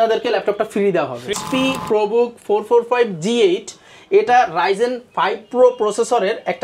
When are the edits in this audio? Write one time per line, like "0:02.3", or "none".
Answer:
0:01.4